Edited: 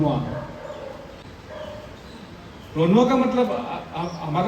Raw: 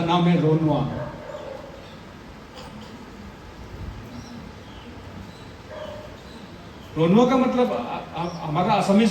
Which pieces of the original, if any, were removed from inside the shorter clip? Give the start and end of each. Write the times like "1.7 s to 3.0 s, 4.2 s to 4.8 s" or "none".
1.9 s to 5.4 s